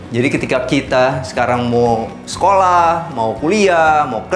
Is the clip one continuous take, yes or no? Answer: yes